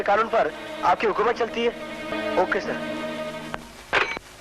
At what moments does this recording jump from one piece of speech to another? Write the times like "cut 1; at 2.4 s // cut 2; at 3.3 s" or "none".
cut 1; at 2.1 s